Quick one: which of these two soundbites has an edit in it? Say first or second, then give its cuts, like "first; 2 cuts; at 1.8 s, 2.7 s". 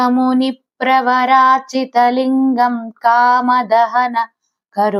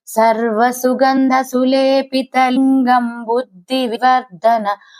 second; 3 cuts; at 1.2 s, 2.5 s, 4.0 s